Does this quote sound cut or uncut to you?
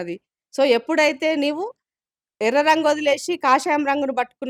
uncut